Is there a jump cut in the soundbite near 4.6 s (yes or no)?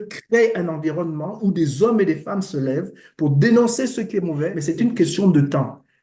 yes